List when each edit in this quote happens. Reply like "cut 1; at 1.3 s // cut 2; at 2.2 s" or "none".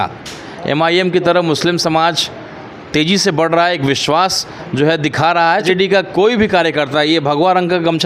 cut 1; at 5.6 s